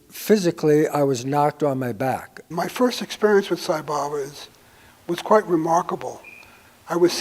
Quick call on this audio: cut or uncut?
cut